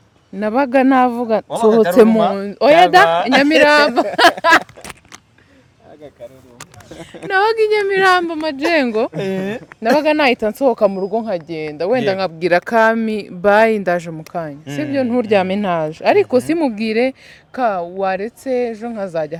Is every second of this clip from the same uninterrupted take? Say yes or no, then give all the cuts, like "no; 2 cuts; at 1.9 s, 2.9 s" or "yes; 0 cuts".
yes; 0 cuts